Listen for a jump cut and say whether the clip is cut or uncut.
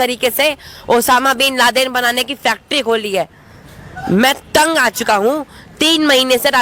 uncut